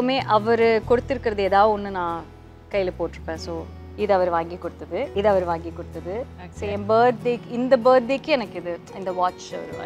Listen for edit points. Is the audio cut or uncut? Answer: cut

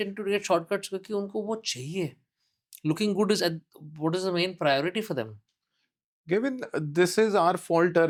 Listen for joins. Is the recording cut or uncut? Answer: uncut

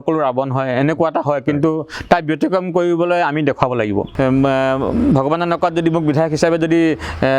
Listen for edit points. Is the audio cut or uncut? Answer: cut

